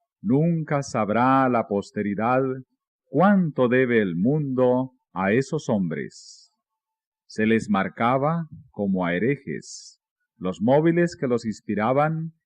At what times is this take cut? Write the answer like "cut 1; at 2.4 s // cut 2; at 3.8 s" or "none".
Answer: cut 1; at 8.5 s